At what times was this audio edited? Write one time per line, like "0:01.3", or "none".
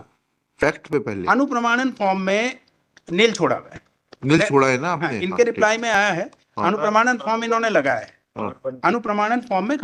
none